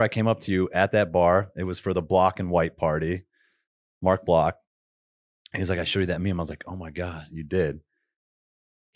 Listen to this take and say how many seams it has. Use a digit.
0